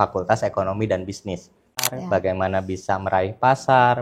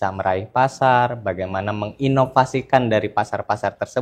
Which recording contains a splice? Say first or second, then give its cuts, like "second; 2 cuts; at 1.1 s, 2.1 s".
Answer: first; 1 cut; at 2.0 s